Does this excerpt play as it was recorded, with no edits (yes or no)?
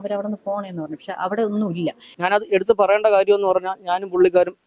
no